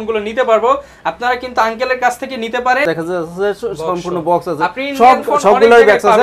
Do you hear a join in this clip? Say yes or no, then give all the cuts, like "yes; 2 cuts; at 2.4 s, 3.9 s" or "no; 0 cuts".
yes; 1 cut; at 2.9 s